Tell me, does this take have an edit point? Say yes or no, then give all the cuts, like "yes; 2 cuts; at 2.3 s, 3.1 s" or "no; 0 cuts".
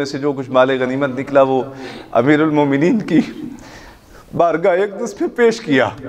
no; 0 cuts